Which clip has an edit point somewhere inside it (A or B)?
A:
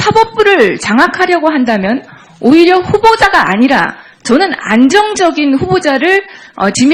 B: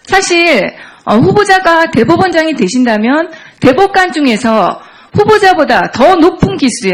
A